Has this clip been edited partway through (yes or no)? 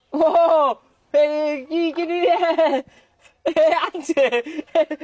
no